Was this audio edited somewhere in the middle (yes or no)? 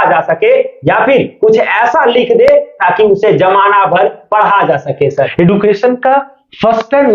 yes